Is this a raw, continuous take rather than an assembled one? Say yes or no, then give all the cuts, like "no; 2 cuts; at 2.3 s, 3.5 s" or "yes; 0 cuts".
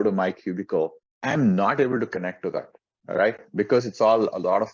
no; 1 cut; at 1.1 s